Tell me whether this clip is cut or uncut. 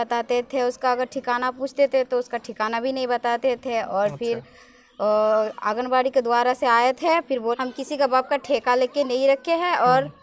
cut